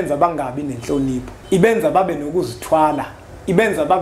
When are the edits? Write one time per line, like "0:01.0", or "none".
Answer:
0:01.3

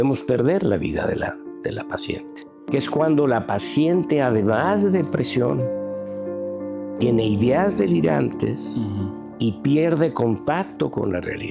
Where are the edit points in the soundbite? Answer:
0:02.6

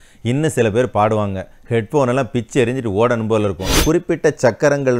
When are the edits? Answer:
0:03.8

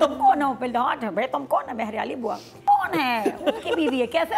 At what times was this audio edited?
0:02.6

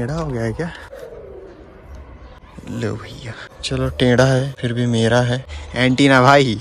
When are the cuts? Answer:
0:00.9
0:02.4
0:03.5
0:04.5
0:05.6

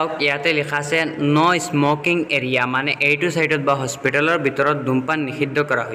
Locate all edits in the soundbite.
none

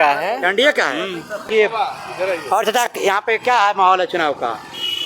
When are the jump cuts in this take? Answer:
0:01.5

